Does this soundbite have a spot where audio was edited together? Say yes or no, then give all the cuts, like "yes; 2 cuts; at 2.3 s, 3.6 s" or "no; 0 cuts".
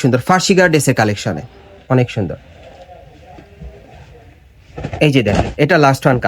no; 0 cuts